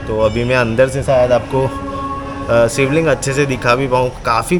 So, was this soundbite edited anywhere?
no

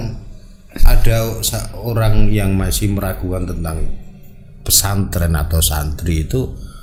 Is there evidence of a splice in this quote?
no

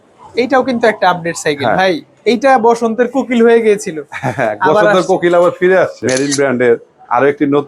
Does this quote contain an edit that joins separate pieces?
yes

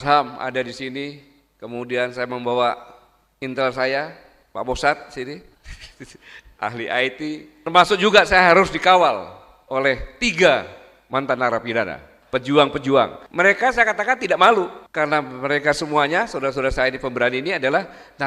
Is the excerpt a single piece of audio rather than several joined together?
yes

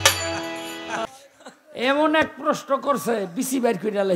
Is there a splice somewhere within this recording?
yes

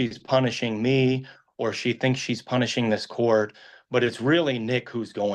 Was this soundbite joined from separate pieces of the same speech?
no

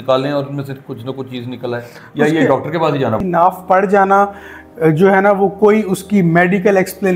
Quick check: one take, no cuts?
no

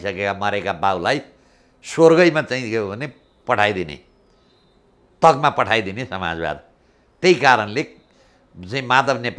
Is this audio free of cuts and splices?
yes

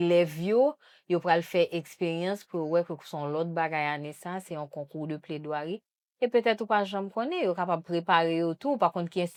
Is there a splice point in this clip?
no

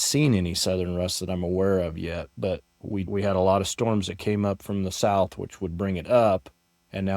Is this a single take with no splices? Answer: no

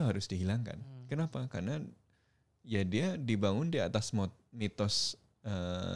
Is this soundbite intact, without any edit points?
yes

